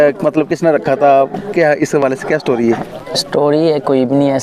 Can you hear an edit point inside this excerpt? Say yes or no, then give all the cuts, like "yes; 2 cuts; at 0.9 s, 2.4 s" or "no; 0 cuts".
no; 0 cuts